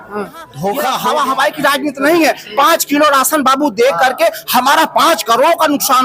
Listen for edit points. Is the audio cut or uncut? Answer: cut